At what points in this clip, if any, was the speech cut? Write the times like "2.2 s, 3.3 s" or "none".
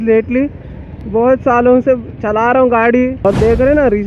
3.1 s

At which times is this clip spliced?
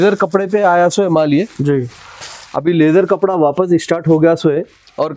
none

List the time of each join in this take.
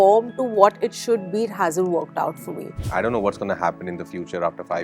2.8 s

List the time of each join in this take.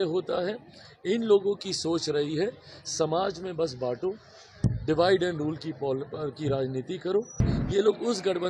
7.4 s

